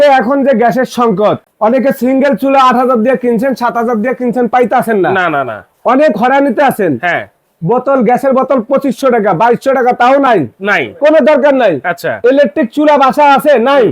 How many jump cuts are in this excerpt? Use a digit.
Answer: 1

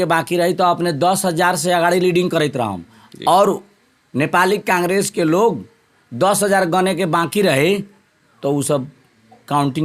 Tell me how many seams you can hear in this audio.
0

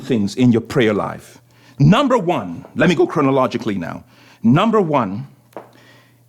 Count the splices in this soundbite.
0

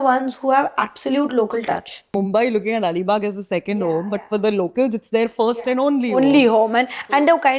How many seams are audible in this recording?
1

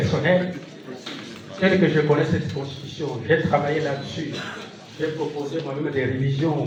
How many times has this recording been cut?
0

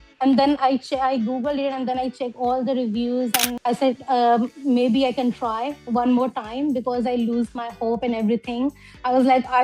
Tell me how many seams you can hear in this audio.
1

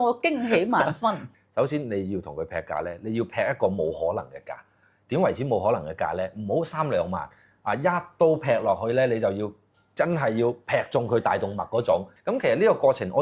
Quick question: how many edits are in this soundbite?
1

